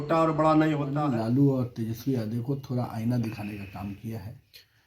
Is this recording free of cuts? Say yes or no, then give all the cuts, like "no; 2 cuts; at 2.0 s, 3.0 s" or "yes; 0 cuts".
no; 1 cut; at 0.9 s